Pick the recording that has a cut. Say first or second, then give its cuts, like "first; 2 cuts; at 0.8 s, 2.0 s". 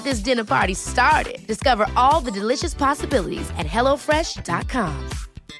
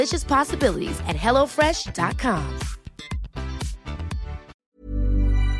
second; 1 cut; at 4.6 s